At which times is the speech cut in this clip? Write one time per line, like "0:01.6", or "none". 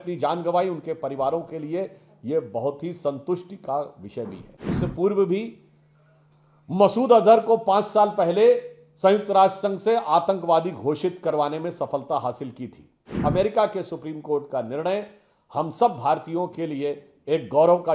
0:04.8
0:13.0